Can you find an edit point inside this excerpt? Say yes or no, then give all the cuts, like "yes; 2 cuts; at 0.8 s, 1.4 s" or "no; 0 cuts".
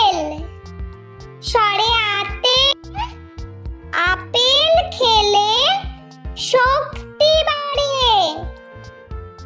yes; 1 cut; at 8.5 s